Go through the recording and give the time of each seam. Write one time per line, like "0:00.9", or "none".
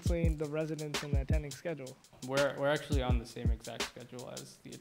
0:02.2